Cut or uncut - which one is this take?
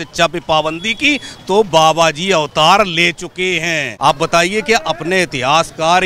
cut